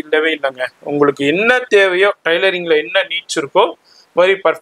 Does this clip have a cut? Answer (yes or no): no